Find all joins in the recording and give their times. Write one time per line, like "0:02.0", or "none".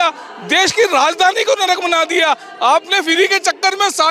none